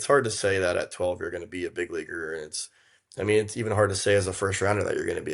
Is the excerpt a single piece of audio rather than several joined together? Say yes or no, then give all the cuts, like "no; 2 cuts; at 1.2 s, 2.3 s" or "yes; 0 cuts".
yes; 0 cuts